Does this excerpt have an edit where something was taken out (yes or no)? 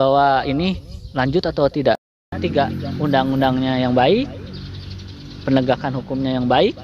yes